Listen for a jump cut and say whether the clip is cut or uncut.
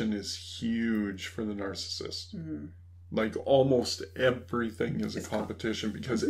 uncut